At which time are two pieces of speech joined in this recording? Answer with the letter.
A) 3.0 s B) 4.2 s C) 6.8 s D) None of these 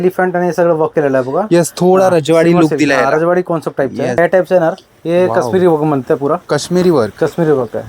B